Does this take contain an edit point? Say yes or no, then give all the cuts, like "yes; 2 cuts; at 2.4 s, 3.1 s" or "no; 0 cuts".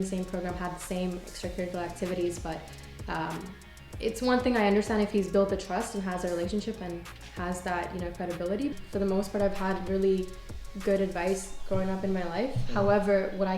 yes; 1 cut; at 8.7 s